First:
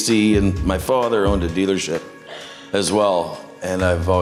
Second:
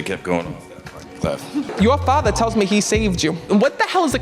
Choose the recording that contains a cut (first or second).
second